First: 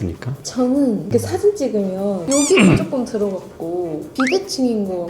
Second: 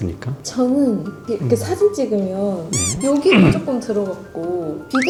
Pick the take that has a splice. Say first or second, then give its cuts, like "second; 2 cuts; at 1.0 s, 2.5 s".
first; 2 cuts; at 1.1 s, 2.2 s